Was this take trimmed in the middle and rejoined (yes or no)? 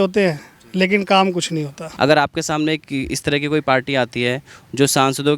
yes